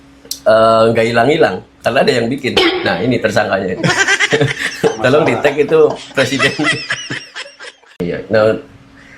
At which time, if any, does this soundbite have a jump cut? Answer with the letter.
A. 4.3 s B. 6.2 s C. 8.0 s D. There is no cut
C